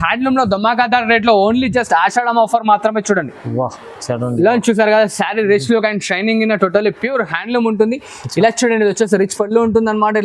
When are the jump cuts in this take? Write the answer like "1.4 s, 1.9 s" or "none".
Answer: none